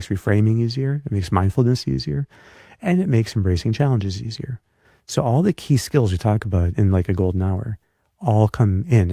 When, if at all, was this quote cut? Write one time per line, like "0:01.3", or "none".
none